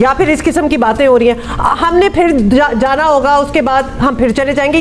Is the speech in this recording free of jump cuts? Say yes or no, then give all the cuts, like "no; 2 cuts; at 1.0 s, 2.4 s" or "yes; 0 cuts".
yes; 0 cuts